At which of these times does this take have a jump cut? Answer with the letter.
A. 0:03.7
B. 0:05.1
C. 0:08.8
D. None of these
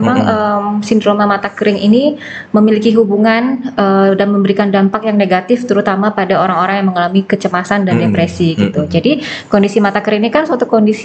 D